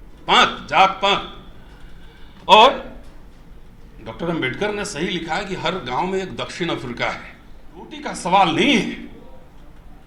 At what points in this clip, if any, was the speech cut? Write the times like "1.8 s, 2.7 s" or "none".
8.0 s